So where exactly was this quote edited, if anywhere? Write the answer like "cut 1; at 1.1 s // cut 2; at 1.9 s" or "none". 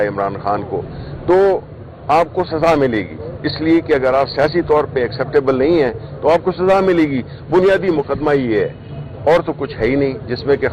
none